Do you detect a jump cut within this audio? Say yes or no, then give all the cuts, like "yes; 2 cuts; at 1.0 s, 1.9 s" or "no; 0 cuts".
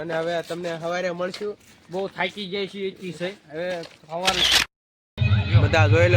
yes; 1 cut; at 4.4 s